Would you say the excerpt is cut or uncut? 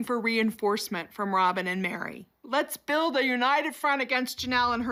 uncut